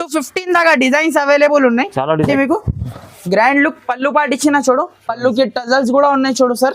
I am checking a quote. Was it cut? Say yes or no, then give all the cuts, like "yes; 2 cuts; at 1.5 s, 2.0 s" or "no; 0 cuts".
yes; 1 cut; at 2.3 s